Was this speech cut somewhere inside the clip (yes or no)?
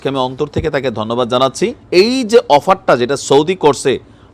yes